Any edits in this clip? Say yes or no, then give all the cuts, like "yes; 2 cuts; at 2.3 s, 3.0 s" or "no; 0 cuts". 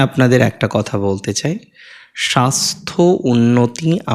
no; 0 cuts